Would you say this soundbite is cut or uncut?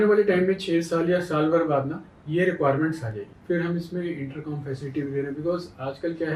uncut